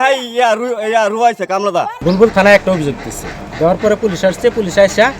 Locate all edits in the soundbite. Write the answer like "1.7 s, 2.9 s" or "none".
1.9 s